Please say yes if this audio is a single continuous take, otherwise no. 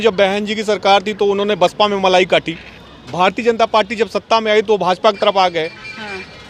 yes